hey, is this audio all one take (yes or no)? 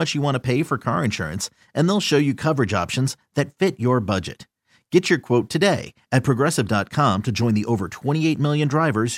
yes